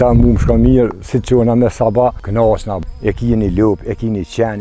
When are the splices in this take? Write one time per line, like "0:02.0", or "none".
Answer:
0:02.7